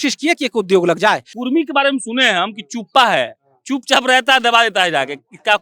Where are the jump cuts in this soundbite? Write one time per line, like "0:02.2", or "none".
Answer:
0:01.3